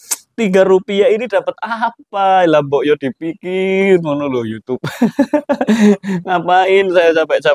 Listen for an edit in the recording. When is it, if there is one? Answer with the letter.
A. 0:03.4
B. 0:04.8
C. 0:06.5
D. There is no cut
D